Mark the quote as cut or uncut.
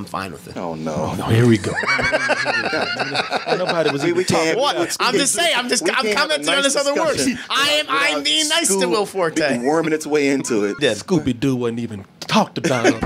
cut